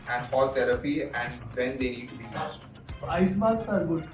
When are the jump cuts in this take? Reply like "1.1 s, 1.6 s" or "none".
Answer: 3.0 s